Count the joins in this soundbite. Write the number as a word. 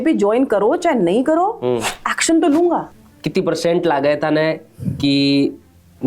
one